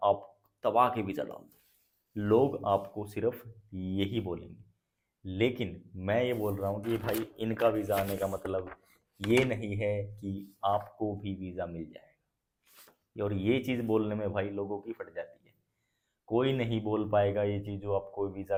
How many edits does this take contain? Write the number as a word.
zero